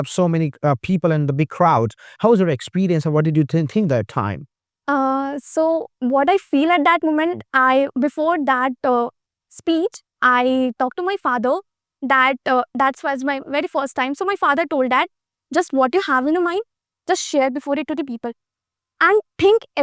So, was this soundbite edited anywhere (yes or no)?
no